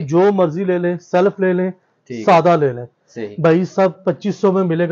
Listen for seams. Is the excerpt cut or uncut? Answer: uncut